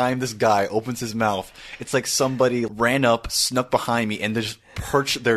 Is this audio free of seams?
no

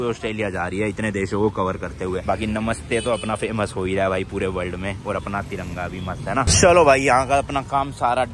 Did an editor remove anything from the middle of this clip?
no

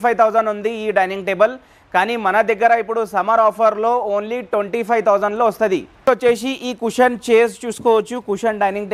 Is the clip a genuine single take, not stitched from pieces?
yes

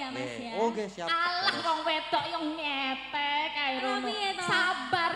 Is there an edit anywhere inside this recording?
no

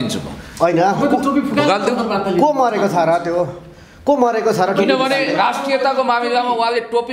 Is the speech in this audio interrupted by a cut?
no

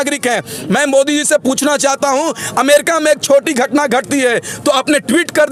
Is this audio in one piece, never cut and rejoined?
yes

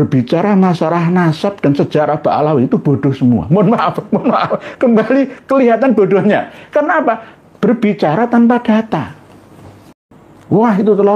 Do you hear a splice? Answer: yes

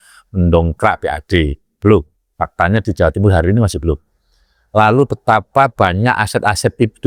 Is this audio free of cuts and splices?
yes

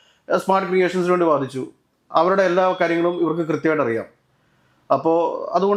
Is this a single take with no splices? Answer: yes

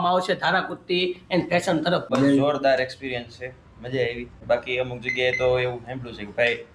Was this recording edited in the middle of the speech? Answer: yes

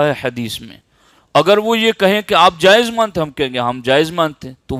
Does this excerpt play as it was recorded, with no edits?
yes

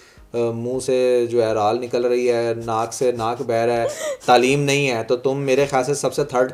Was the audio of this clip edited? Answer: no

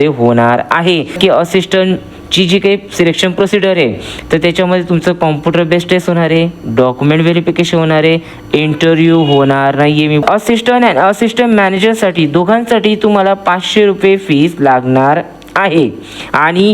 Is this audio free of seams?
no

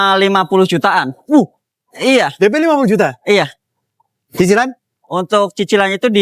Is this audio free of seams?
yes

